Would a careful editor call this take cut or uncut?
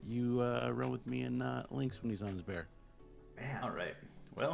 cut